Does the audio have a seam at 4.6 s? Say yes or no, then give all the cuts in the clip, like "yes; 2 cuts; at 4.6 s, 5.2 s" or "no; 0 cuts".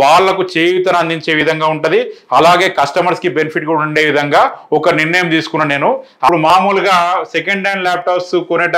no; 1 cut; at 6.3 s